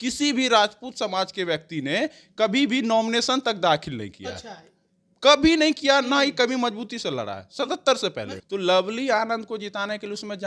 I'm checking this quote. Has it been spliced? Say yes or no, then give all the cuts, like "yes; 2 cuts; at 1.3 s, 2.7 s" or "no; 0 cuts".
yes; 1 cut; at 8.3 s